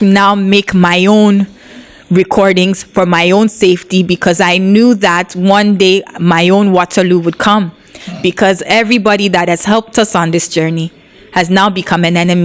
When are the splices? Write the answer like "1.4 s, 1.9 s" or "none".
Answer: none